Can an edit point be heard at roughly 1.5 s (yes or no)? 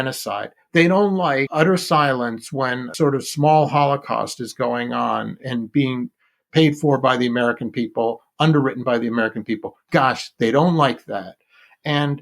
yes